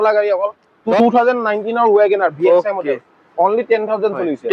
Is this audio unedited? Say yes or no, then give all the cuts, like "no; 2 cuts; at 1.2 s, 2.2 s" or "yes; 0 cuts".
no; 1 cut; at 1.0 s